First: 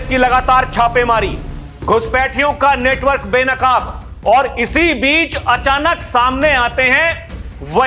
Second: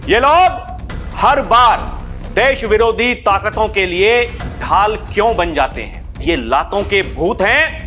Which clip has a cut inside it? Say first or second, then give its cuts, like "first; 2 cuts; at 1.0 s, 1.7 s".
second; 1 cut; at 6.2 s